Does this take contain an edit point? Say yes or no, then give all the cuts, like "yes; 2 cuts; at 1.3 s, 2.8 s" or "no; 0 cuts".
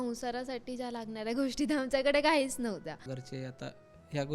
yes; 1 cut; at 3.0 s